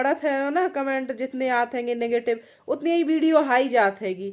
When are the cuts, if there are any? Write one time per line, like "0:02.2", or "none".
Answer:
none